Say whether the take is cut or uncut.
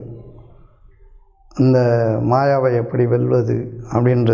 uncut